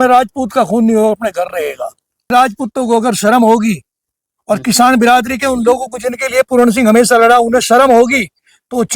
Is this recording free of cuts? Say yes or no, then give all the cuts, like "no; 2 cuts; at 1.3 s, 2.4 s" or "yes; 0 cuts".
no; 1 cut; at 2.3 s